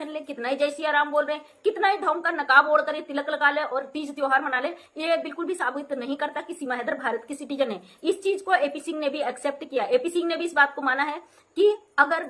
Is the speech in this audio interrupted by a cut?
no; 0 cuts

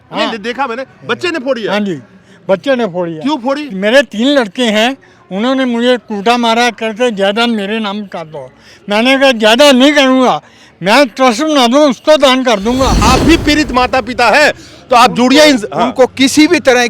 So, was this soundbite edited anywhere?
yes; 1 cut; at 13.0 s

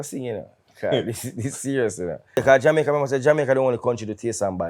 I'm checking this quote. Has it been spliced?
yes; 1 cut; at 2.4 s

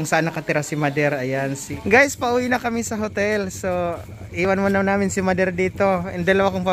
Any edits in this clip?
yes; 1 cut; at 1.8 s

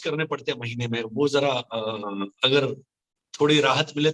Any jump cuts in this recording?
no; 0 cuts

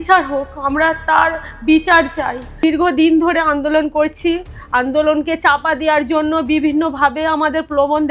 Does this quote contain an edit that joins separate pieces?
yes; 1 cut; at 2.4 s

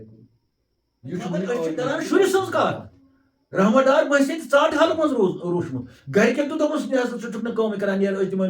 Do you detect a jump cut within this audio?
yes; 1 cut; at 1.8 s

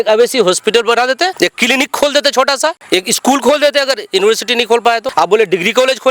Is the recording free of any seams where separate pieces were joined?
no; 3 cuts; at 1.3 s, 2.8 s, 5.1 s

